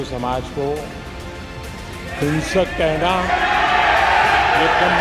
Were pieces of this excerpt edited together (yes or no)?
no